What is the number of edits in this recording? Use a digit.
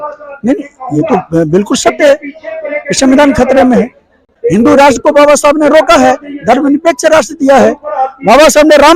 1